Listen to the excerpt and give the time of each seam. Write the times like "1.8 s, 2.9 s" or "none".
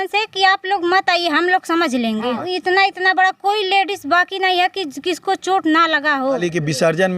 2.4 s, 6.4 s